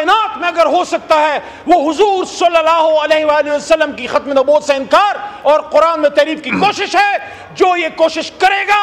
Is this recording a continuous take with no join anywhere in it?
yes; 0 cuts

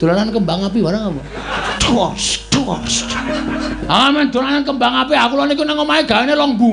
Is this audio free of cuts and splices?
no; 2 cuts; at 1.7 s, 3.8 s

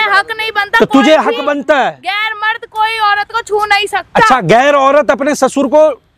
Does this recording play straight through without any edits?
yes; 0 cuts

